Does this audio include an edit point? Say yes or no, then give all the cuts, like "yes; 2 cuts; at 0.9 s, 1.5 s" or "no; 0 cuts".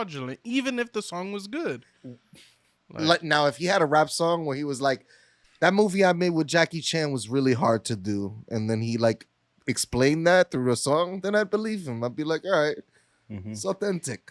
no; 0 cuts